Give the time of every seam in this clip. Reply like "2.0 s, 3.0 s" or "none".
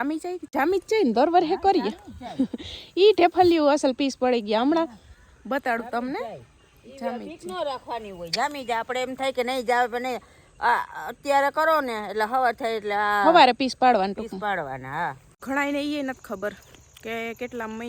15.4 s